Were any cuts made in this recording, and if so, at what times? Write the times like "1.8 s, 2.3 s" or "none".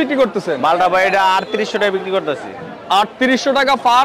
none